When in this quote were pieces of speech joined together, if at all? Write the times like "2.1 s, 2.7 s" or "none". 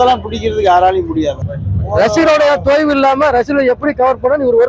1.4 s